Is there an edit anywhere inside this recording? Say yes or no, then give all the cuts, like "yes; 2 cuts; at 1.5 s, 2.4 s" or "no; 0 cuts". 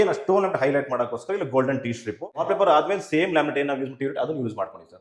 yes; 1 cut; at 2.4 s